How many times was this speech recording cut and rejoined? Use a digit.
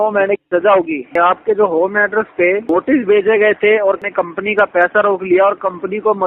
3